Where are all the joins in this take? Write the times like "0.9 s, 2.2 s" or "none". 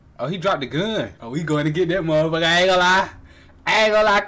1.2 s